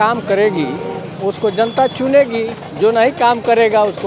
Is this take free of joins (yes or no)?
yes